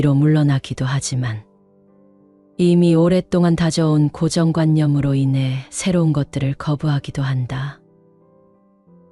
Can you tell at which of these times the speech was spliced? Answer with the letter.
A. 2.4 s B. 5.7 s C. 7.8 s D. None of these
C